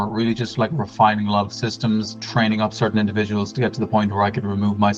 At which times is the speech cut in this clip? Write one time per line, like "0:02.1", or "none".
0:02.2